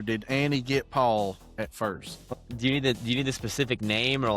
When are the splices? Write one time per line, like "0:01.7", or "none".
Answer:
0:02.3